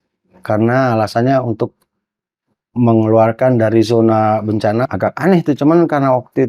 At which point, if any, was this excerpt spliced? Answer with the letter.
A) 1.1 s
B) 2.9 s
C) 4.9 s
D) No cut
C